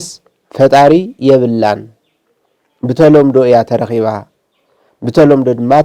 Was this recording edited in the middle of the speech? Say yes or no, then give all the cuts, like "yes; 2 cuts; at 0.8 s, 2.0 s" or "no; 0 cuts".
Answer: no; 0 cuts